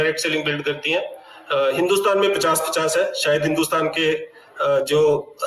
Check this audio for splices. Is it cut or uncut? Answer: uncut